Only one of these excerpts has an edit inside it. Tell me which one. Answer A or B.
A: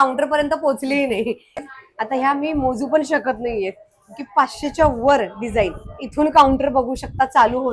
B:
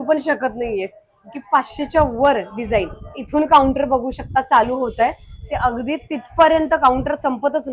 A